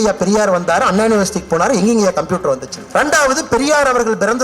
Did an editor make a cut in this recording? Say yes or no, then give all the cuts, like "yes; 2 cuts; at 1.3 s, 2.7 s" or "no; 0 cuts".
yes; 1 cut; at 2.7 s